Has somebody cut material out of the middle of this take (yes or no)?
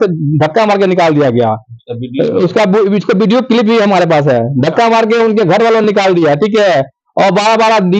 no